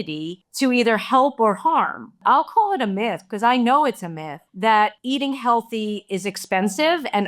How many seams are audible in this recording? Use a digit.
2